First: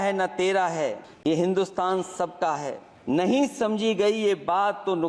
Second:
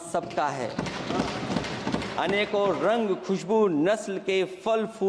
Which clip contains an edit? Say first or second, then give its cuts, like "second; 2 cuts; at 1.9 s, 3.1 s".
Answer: first; 2 cuts; at 1.1 s, 2.9 s